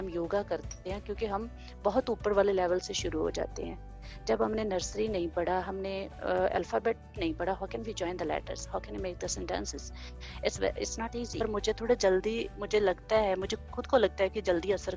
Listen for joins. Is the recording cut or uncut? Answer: cut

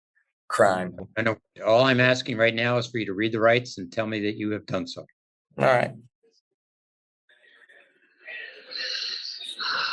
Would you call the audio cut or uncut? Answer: uncut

